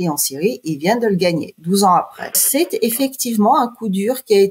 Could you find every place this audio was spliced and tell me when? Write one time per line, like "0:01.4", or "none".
0:02.4